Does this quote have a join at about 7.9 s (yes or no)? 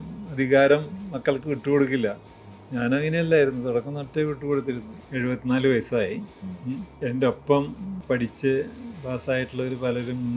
yes